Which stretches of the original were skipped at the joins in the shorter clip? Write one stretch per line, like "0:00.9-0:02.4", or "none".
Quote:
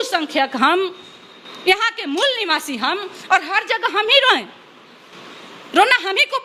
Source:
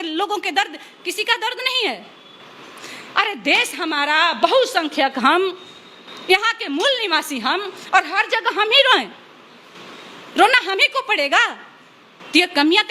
none